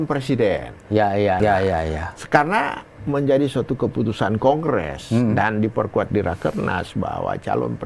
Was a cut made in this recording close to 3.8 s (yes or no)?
no